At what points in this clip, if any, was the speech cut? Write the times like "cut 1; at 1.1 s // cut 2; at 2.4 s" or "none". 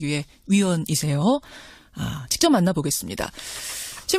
none

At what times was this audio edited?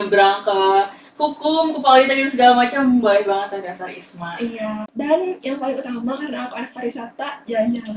cut 1; at 4.9 s

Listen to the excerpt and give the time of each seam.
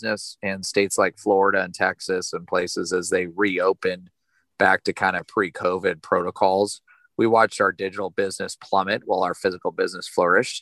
none

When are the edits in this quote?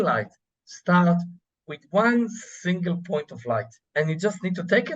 cut 1; at 3.8 s

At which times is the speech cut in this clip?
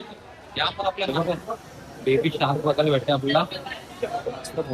cut 1; at 1.1 s

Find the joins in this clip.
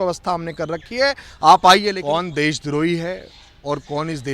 cut 1; at 2.0 s

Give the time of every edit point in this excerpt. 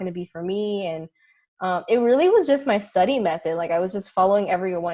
none

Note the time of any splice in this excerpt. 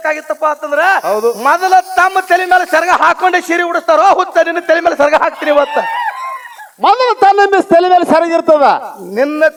none

